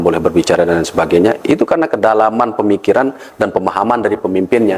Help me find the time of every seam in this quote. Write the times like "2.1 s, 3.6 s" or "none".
none